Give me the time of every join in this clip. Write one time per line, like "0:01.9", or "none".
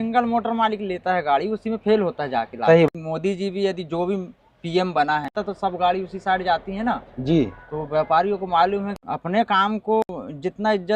0:02.9
0:05.3
0:08.9
0:10.0